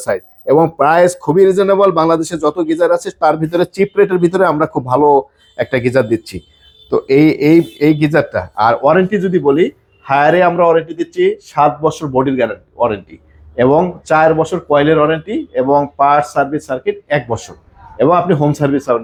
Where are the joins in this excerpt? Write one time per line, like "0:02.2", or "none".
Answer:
none